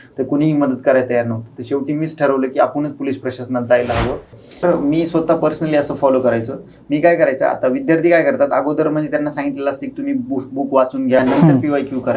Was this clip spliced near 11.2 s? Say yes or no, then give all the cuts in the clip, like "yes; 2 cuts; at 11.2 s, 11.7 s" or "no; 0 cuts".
yes; 2 cuts; at 4.6 s, 11.2 s